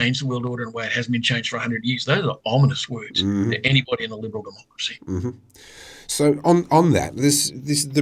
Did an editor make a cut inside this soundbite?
no; 0 cuts

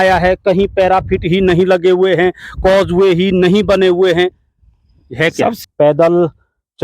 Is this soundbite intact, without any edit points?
no; 1 cut; at 5.6 s

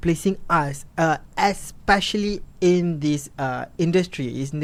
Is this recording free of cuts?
yes; 0 cuts

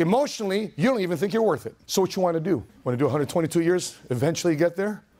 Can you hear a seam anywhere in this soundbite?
yes; 2 cuts; at 1.8 s, 2.7 s

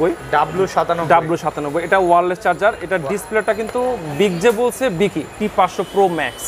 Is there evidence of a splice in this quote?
yes; 1 cut; at 5.3 s

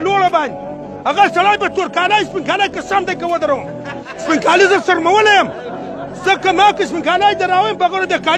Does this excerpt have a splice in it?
no; 0 cuts

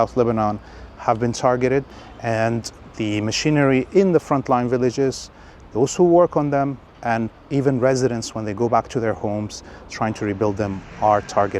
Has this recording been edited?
yes; 1 cut; at 2.0 s

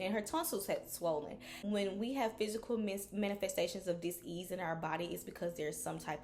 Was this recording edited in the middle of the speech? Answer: yes; 1 cut; at 1.6 s

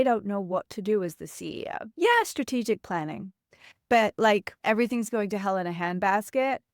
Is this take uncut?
no; 1 cut; at 4.5 s

